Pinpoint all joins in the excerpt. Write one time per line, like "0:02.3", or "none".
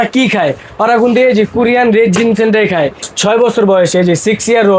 0:03.1

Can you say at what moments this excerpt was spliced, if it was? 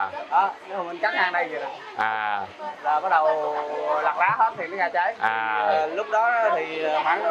none

